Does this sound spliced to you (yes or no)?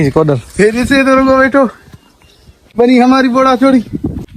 no